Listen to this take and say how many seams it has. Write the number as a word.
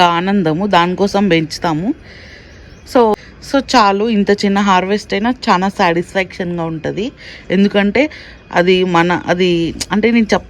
one